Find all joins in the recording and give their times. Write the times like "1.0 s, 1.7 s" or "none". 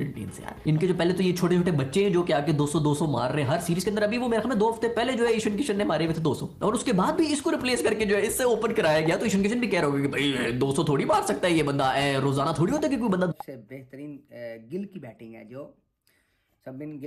13.3 s